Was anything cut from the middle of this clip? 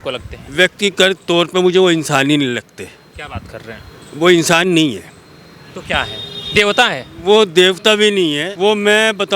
yes; 1 cut; at 8.5 s

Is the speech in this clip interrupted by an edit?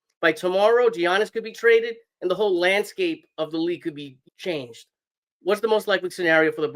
yes; 1 cut; at 4.1 s

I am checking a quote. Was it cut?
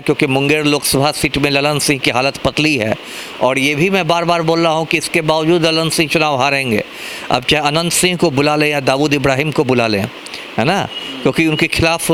no; 0 cuts

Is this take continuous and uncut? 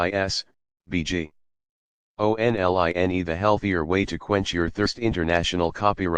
no; 1 cut; at 3.2 s

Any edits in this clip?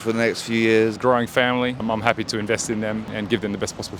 yes; 3 cuts; at 1.0 s, 1.8 s, 3.1 s

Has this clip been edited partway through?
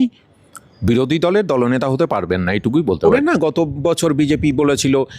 yes; 1 cut; at 3.4 s

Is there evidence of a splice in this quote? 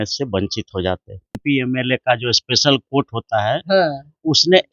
yes; 1 cut; at 1.4 s

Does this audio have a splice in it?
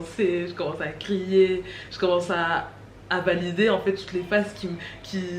no; 0 cuts

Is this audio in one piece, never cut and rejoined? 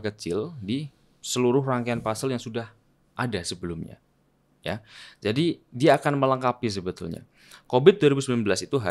yes; 0 cuts

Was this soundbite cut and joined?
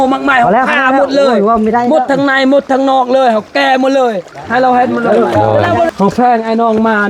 yes; 1 cut; at 5.9 s

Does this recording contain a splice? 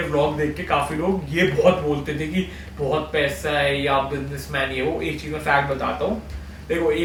no; 0 cuts

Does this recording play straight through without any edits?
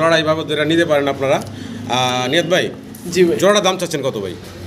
yes; 0 cuts

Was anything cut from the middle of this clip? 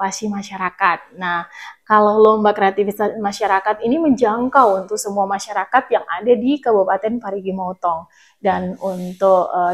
no; 0 cuts

